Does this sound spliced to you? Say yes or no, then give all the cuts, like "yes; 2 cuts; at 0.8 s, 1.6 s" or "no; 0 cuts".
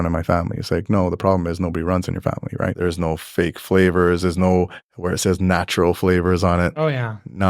yes; 1 cut; at 2.7 s